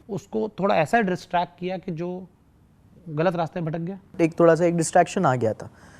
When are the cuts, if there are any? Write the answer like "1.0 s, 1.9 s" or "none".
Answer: 4.2 s